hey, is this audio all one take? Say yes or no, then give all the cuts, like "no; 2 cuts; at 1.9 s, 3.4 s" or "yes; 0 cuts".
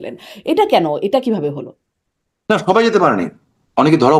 yes; 0 cuts